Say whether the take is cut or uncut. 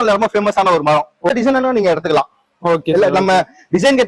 cut